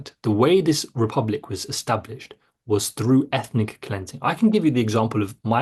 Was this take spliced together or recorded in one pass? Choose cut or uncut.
uncut